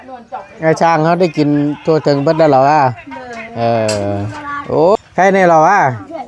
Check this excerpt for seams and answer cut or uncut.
cut